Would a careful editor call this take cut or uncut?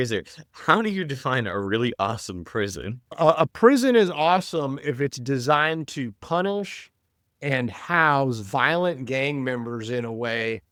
uncut